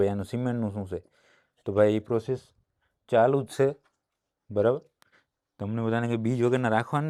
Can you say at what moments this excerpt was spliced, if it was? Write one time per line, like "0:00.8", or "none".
none